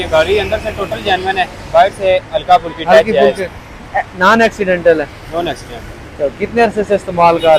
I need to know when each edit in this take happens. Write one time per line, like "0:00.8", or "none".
none

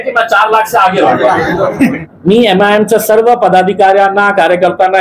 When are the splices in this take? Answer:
0:02.1

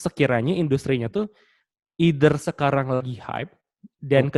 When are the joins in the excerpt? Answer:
none

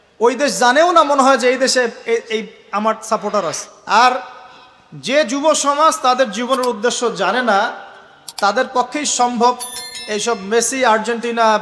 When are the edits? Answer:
0:03.7

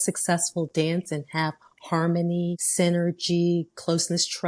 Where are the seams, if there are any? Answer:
0:02.6

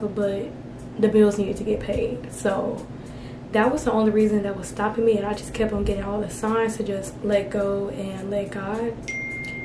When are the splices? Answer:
none

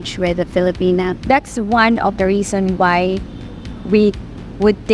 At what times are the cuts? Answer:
0:01.2

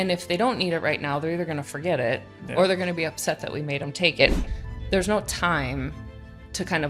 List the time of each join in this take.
0:04.4

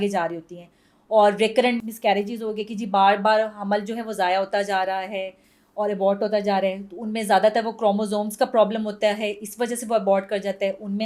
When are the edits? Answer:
none

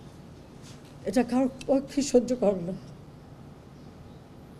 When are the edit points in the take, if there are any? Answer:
none

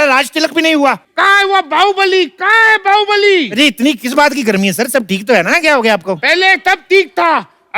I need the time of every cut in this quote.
0:01.1

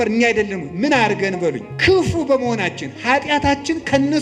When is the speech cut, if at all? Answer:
0:01.7

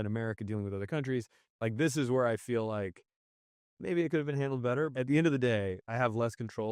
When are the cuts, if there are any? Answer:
0:04.9
0:05.8

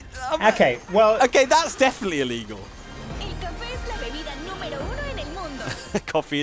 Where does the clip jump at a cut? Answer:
0:02.9

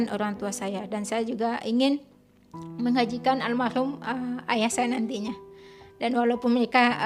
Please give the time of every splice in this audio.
none

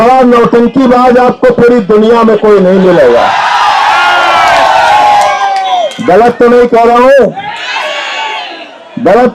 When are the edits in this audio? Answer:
none

